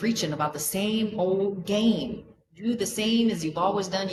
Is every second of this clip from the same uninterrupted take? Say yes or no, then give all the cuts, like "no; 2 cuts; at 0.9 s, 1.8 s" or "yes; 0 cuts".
yes; 0 cuts